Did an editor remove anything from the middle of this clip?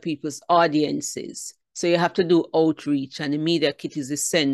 no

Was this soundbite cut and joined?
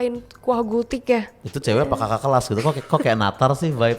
yes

